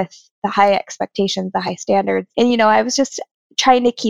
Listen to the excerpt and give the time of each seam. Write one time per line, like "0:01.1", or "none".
0:02.3